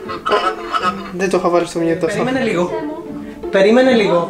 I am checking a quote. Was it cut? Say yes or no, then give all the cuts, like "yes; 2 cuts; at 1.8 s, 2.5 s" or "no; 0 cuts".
yes; 1 cut; at 2.2 s